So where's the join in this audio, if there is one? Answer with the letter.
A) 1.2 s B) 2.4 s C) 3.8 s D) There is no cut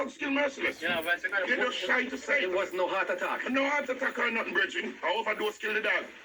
C